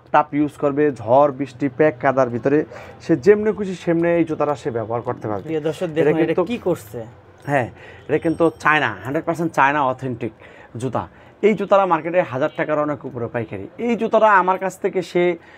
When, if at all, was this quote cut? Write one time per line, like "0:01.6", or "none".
none